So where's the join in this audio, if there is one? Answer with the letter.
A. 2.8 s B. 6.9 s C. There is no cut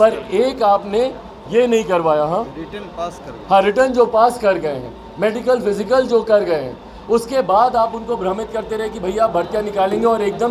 C